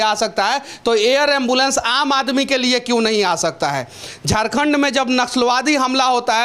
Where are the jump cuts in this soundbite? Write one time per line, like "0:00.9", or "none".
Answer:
none